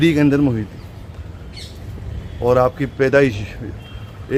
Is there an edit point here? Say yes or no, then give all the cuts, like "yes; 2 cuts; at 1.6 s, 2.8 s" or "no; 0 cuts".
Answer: no; 0 cuts